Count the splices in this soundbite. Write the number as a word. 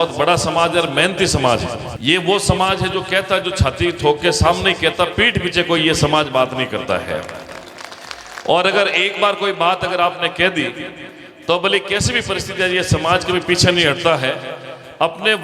one